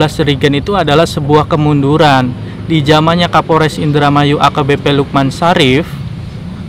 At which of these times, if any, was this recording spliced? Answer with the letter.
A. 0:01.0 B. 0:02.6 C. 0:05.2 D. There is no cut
D